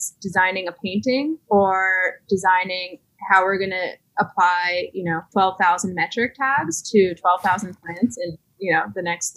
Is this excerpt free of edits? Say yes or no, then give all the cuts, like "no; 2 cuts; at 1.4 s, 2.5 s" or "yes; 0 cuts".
no; 2 cuts; at 4.0 s, 5.2 s